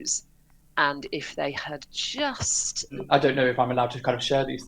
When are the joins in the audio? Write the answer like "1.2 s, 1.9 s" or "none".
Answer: 3.0 s